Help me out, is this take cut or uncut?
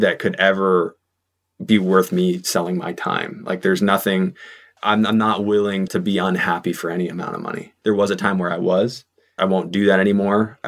cut